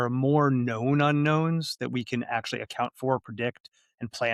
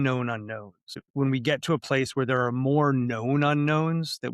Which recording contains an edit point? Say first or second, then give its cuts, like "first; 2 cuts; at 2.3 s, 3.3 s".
second; 1 cut; at 1.0 s